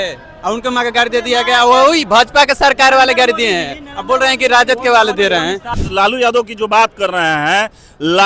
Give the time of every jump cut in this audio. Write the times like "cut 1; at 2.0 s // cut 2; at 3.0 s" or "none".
cut 1; at 5.8 s